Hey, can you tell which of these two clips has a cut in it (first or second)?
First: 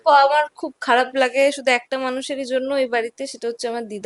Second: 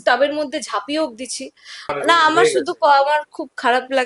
second